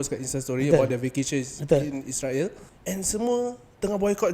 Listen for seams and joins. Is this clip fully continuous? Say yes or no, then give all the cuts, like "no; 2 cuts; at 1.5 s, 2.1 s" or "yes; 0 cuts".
no; 1 cut; at 2.6 s